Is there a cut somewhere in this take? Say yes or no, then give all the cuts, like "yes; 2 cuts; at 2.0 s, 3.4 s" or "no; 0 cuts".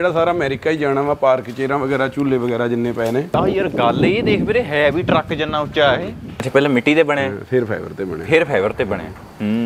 yes; 2 cuts; at 3.3 s, 6.4 s